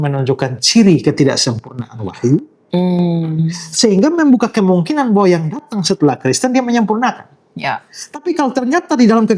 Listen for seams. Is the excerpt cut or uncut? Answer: uncut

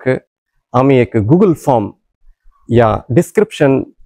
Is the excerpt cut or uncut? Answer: uncut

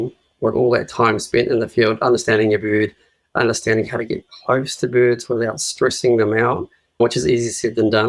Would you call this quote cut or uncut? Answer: uncut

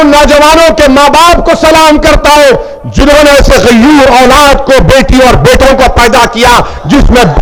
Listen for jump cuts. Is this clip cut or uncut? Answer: uncut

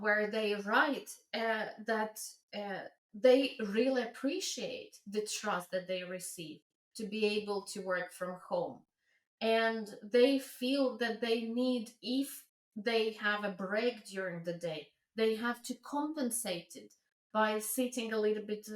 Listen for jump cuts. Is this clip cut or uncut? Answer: uncut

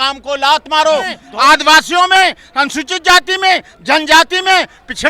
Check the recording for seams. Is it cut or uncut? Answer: cut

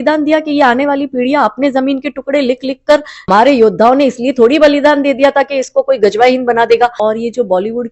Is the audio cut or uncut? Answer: cut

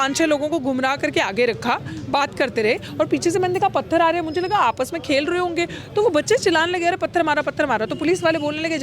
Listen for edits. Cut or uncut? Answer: uncut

